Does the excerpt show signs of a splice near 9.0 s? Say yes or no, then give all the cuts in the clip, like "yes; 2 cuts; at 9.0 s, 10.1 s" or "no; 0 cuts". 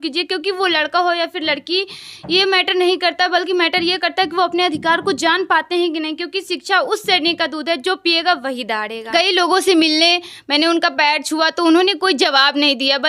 yes; 1 cut; at 9.0 s